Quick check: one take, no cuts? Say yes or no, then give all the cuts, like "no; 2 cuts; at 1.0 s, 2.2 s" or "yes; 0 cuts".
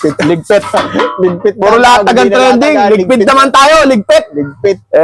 yes; 0 cuts